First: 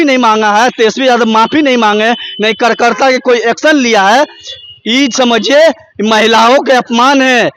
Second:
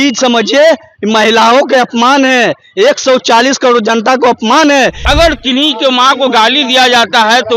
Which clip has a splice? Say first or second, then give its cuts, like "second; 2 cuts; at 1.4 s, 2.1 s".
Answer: second; 1 cut; at 5.0 s